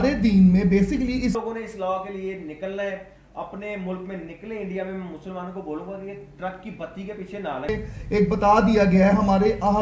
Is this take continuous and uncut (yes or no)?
no